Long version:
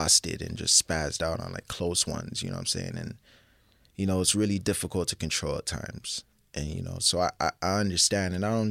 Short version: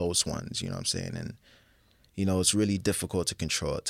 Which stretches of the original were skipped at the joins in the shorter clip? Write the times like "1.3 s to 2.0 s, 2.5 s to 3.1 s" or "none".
none